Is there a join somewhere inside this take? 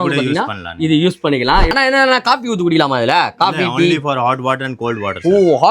yes; 1 cut; at 1.7 s

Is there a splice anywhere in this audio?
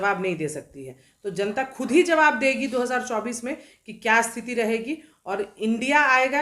no; 0 cuts

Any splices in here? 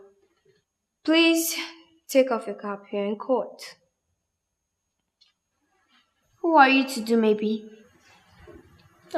yes; 1 cut; at 6.2 s

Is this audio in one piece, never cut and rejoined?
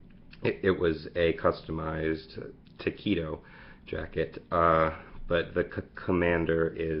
no; 1 cut; at 4.8 s

